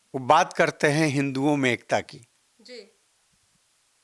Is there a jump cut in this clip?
no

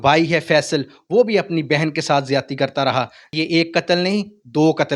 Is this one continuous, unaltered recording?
no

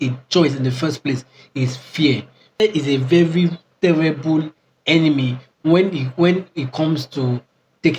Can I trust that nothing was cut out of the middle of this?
no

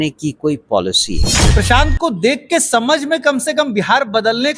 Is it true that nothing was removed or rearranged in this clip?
no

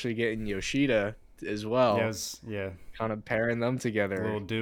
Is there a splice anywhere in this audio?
no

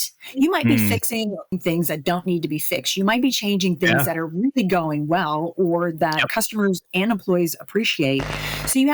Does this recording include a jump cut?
yes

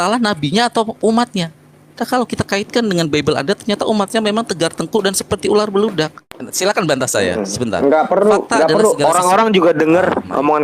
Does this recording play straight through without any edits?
no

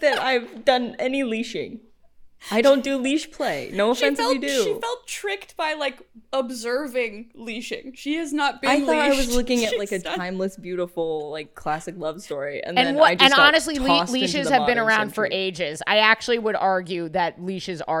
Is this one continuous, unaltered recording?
yes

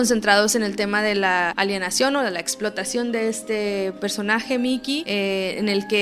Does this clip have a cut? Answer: yes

